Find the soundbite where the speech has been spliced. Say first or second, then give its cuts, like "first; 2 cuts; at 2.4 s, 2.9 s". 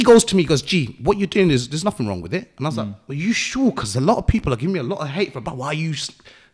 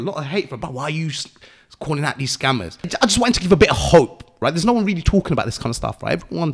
second; 1 cut; at 2.9 s